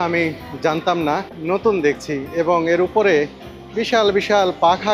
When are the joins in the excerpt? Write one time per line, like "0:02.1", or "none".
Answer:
0:01.3